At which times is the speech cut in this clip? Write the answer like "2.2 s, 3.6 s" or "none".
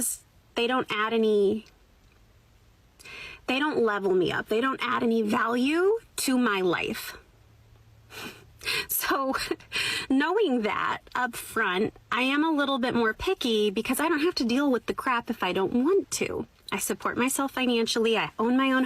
17.0 s